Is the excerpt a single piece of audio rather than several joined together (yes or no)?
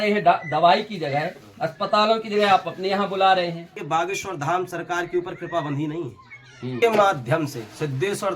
no